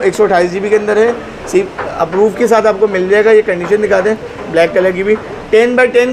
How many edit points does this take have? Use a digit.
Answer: 0